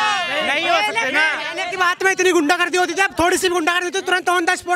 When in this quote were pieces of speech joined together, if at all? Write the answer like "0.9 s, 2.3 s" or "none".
1.6 s